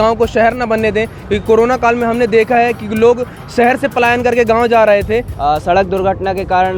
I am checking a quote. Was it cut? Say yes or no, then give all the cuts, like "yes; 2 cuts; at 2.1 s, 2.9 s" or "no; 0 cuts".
yes; 1 cut; at 5.3 s